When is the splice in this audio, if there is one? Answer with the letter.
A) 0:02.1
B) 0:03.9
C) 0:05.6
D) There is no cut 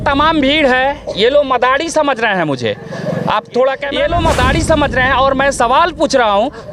B